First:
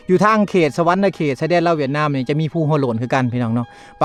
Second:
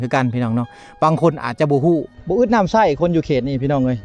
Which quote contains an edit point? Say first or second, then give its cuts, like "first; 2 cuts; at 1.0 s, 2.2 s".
second; 1 cut; at 2.1 s